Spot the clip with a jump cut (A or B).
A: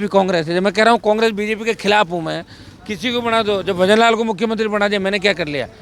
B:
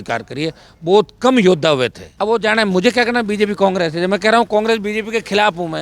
B